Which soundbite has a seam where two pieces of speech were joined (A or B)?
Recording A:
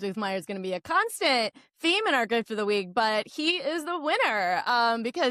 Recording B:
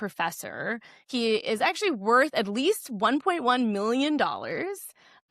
B